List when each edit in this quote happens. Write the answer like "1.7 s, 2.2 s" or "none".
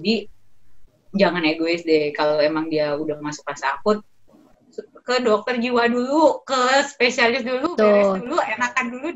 none